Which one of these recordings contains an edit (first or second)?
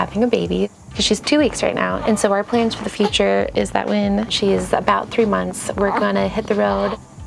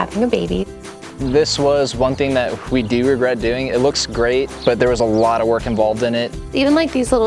second